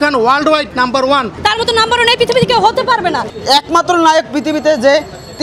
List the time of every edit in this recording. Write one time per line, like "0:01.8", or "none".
0:01.3
0:03.3